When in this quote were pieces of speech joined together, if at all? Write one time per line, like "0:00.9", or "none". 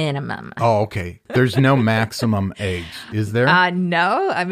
0:01.2